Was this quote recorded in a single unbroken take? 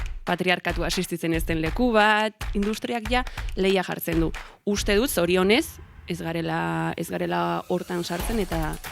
no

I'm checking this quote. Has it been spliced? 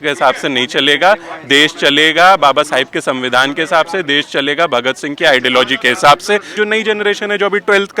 yes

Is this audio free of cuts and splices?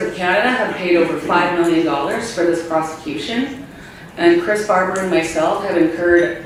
yes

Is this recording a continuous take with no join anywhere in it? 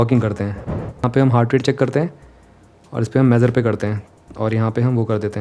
no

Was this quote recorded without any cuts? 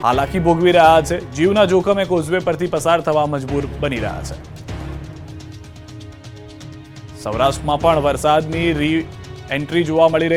yes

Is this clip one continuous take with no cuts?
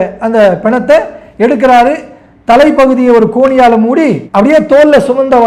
yes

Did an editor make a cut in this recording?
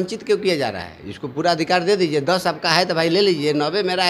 no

